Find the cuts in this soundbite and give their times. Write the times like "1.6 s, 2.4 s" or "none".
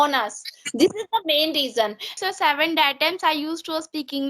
2.1 s